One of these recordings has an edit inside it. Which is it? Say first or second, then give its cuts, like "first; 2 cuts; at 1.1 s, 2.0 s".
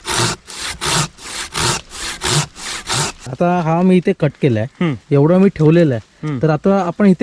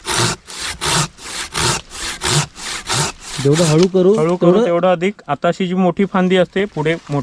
first; 1 cut; at 3.3 s